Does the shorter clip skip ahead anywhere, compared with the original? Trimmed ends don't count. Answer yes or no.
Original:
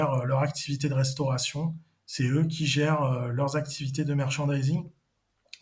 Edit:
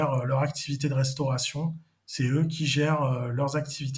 no